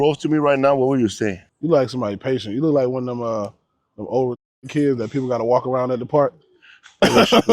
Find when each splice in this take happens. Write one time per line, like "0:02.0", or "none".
0:01.5